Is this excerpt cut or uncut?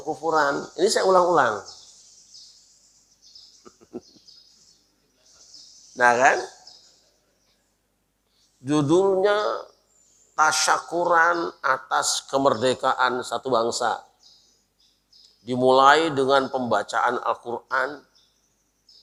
uncut